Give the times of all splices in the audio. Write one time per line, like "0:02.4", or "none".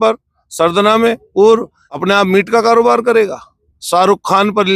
0:01.8